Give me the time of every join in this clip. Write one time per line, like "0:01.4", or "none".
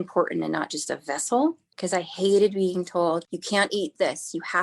0:01.8
0:03.3